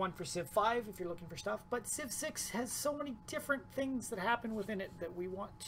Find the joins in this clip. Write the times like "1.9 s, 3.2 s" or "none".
4.2 s